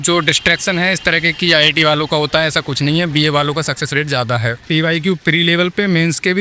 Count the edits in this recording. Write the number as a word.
one